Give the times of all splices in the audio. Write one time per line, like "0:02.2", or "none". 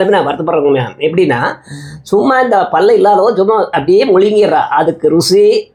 none